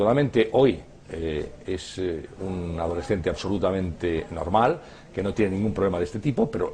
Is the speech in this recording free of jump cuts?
no; 1 cut; at 2.5 s

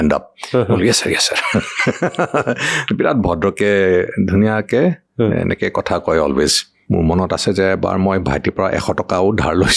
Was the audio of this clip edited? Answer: yes; 1 cut; at 6.7 s

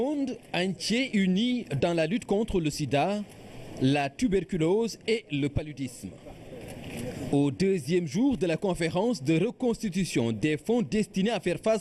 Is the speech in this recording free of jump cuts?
yes; 0 cuts

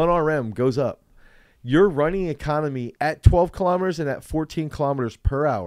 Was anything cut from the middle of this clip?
yes; 1 cut; at 2.9 s

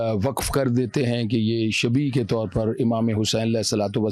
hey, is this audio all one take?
yes; 0 cuts

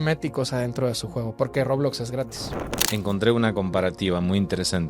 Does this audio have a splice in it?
yes; 1 cut; at 2.8 s

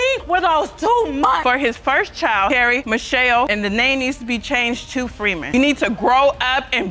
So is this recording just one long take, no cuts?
no; 1 cut; at 1.4 s

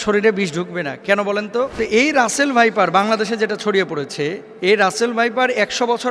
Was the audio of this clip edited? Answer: yes; 2 cuts; at 1.7 s, 4.5 s

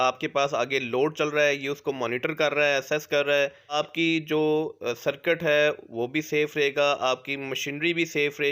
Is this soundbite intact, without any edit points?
no; 1 cut; at 3.7 s

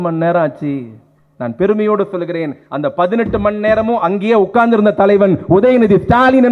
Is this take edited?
no; 0 cuts

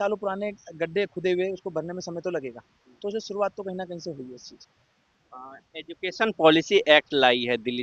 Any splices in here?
no; 0 cuts

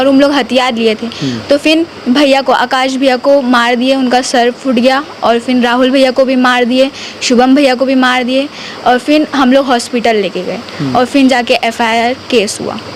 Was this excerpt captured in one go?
yes; 0 cuts

